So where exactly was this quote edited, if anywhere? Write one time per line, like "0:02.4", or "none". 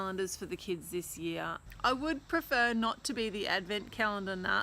0:01.6